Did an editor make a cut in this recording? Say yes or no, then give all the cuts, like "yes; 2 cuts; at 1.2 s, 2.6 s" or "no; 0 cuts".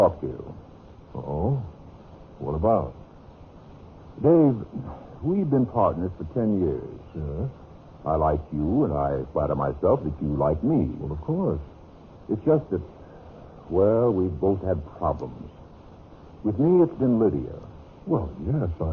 yes; 1 cut; at 11.1 s